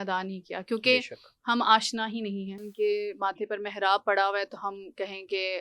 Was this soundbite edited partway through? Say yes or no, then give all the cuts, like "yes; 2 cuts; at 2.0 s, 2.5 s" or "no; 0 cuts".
yes; 1 cut; at 2.7 s